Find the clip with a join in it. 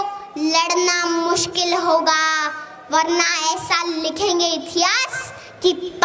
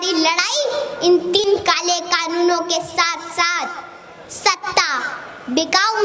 second; 1 cut; at 1.4 s

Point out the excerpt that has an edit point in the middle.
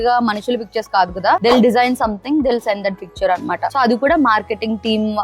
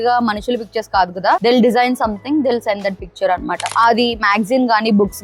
second; 1 cut; at 3.7 s

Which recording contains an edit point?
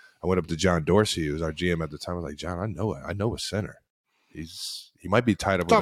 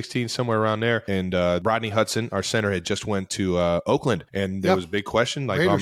second; 2 cuts; at 1.6 s, 4.3 s

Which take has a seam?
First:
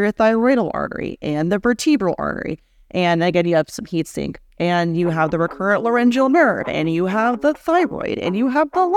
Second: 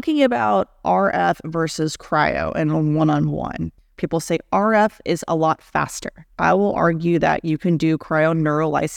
second; 2 cuts; at 3.9 s, 6.2 s

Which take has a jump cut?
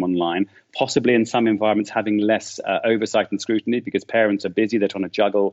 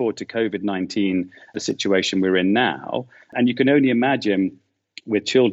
second; 2 cuts; at 1.5 s, 3.3 s

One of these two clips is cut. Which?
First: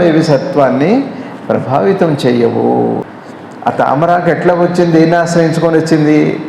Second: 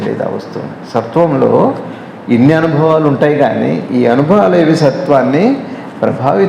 first; 1 cut; at 3.0 s

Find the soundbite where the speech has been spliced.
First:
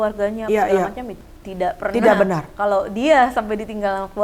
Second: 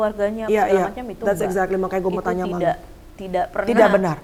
first; 1 cut; at 1.1 s

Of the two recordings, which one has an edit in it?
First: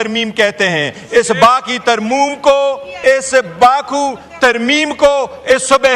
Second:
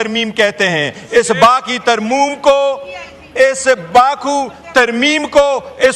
first; 1 cut; at 2.9 s

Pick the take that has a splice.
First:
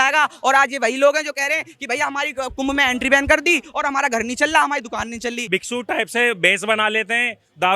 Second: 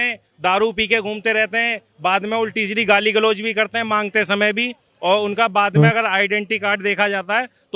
first; 1 cut; at 5.5 s

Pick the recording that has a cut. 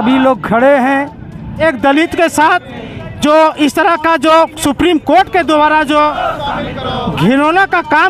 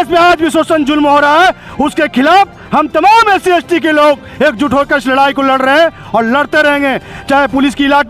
first; 1 cut; at 1.6 s

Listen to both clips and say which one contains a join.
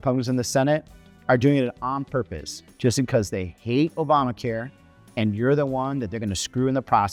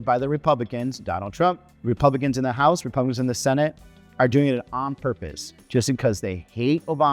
second; 1 cut; at 1.7 s

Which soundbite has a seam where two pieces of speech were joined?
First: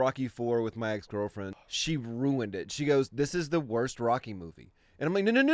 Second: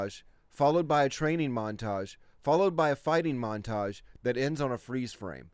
first; 1 cut; at 1.5 s

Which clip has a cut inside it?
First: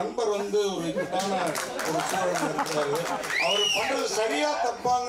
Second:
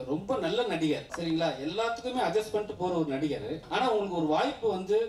second; 2 cuts; at 1.1 s, 3.6 s

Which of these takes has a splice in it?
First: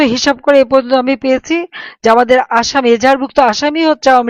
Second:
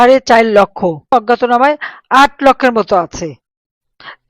second; 1 cut; at 1.1 s

